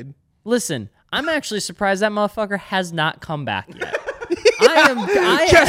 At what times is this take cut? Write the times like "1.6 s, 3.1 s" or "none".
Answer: none